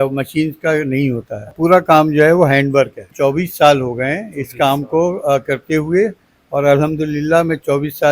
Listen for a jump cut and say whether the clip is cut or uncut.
cut